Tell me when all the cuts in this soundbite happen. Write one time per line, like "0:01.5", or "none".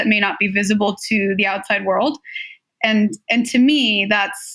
none